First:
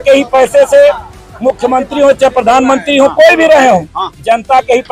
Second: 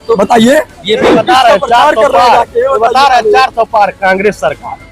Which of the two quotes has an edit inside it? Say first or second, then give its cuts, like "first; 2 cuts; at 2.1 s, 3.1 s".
second; 1 cut; at 1.1 s